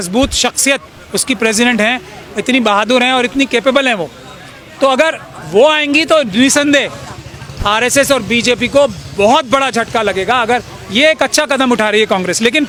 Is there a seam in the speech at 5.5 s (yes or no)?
no